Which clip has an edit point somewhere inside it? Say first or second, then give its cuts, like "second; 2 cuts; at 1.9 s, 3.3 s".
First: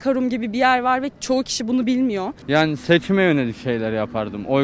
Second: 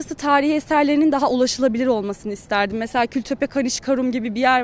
first; 1 cut; at 2.4 s